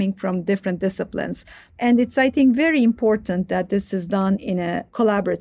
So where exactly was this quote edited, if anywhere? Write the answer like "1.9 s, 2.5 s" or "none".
1.6 s, 4.5 s